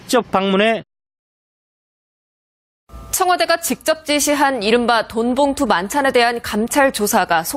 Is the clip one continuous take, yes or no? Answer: yes